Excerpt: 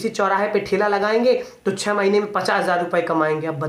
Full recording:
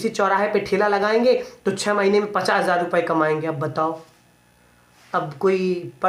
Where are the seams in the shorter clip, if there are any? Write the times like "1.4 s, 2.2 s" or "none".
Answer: none